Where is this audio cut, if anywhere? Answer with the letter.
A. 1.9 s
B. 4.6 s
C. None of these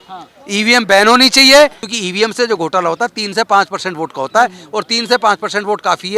A